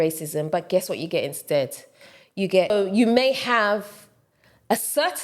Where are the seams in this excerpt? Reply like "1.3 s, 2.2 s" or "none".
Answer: 2.7 s